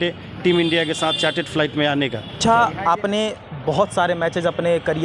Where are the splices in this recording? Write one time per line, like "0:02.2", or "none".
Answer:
0:02.4